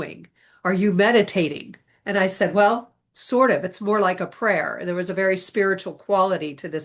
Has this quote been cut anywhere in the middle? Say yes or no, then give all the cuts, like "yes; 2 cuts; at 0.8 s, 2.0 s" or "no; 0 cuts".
no; 0 cuts